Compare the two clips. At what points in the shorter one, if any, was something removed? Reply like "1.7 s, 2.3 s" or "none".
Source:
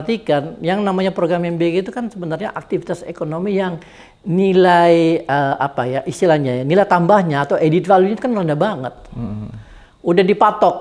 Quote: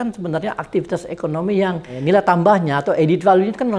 1.9 s